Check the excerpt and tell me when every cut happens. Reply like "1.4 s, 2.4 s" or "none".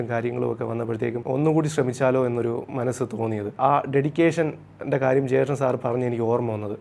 1.2 s, 3.5 s